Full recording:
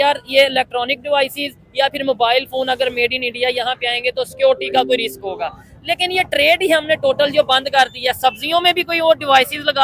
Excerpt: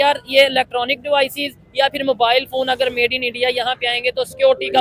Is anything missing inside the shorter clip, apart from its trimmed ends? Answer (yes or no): no